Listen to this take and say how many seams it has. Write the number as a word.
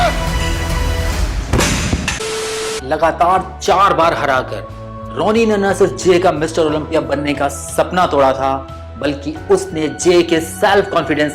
one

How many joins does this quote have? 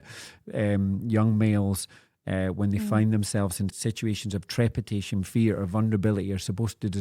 one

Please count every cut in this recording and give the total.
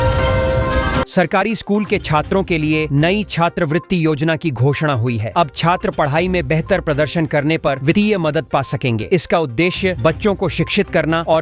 one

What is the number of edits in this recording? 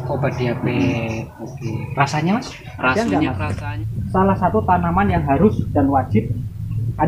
one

